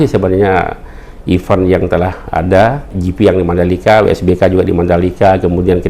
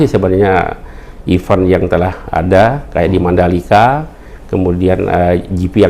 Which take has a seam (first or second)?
first